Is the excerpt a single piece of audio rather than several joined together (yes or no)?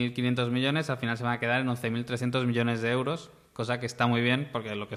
yes